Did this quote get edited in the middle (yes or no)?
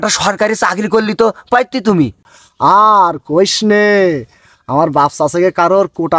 yes